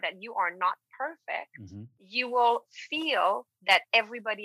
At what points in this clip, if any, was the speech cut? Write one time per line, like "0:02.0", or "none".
0:02.0

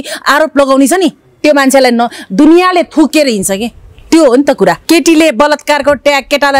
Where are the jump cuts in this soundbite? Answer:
0:04.8

